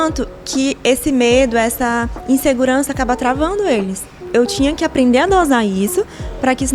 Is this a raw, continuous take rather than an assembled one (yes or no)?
no